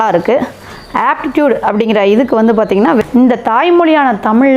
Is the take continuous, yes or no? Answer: no